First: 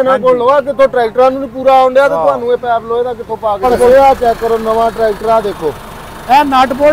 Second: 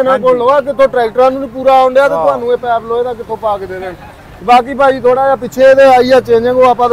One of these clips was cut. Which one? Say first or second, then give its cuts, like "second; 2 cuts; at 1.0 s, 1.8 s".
first; 1 cut; at 3.6 s